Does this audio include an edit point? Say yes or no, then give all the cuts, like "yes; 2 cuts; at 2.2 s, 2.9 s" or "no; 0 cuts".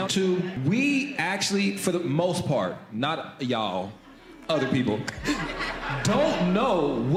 no; 0 cuts